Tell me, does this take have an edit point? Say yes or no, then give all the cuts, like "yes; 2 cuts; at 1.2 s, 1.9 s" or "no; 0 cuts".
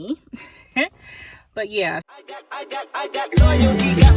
yes; 1 cut; at 2.0 s